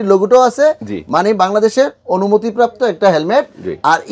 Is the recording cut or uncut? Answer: uncut